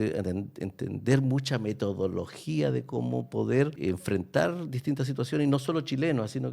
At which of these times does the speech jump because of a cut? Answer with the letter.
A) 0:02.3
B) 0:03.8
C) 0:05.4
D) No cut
B